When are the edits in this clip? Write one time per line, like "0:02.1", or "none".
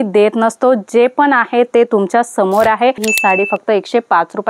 0:03.1